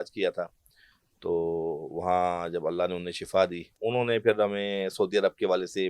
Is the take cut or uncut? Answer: cut